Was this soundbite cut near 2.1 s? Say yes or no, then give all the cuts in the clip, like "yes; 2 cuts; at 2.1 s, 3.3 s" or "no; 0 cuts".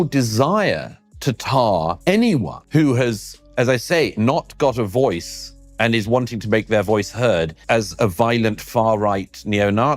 yes; 2 cuts; at 2.1 s, 7.6 s